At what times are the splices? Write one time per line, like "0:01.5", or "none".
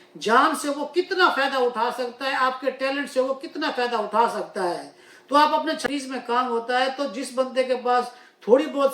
0:05.8